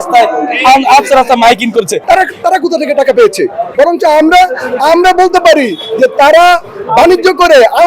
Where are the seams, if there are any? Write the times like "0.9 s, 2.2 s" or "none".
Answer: 2.0 s, 3.6 s

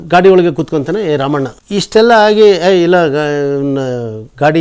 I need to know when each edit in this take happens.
none

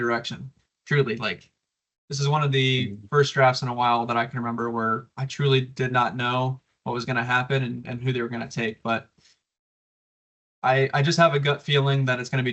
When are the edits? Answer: none

